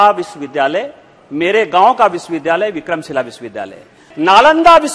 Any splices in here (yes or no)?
yes